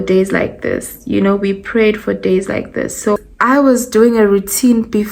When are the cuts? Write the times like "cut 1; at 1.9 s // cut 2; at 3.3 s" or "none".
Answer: cut 1; at 2.9 s